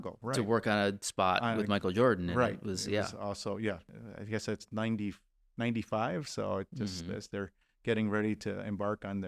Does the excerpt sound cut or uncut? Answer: uncut